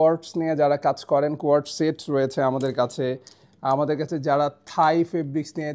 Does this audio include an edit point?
no; 0 cuts

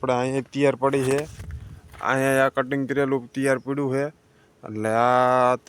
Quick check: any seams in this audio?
no; 0 cuts

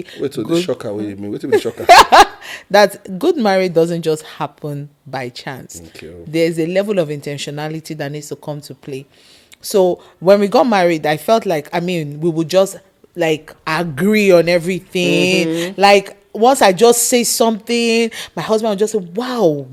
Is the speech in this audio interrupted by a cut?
no; 0 cuts

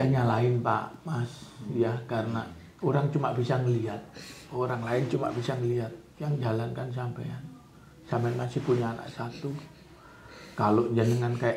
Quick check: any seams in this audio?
no; 0 cuts

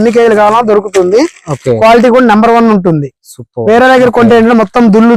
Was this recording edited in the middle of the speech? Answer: no; 0 cuts

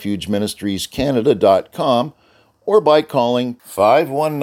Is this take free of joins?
yes; 0 cuts

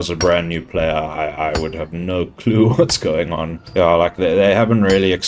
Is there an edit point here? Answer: no; 0 cuts

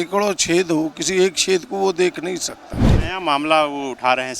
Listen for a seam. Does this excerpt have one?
yes; 1 cut; at 2.9 s

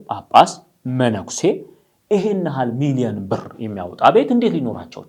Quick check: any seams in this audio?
no; 0 cuts

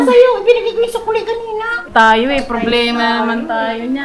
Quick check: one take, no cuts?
no; 1 cut; at 1.9 s

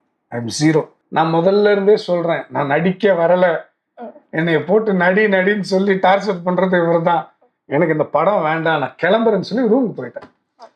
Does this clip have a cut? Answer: yes; 1 cut; at 1.0 s

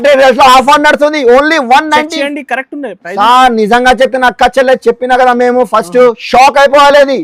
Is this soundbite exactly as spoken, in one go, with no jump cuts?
yes; 0 cuts

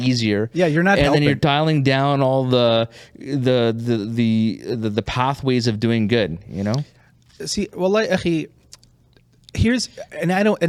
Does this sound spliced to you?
no; 0 cuts

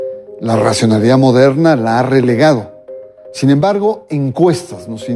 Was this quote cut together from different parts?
no; 0 cuts

